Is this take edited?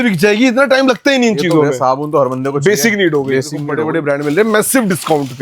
yes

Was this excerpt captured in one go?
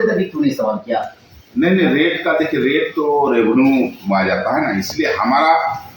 yes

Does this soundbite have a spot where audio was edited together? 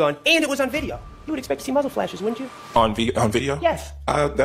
no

